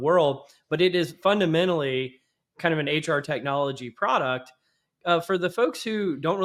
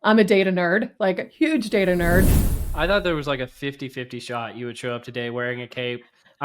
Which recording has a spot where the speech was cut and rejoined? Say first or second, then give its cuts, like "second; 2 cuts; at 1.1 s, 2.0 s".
second; 1 cut; at 2.4 s